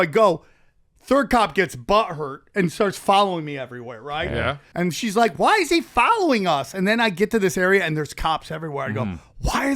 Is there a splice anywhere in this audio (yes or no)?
yes